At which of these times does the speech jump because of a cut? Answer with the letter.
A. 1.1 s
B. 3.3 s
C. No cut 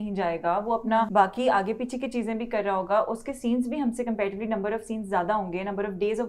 A